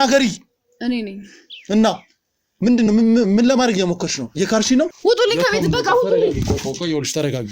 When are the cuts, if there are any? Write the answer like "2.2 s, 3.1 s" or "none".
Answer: 5.0 s